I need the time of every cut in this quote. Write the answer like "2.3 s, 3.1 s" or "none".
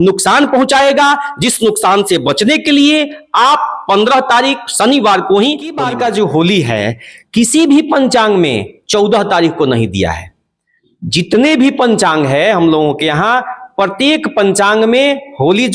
5.8 s